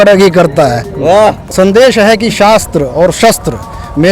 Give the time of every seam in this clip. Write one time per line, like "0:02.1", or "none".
0:01.4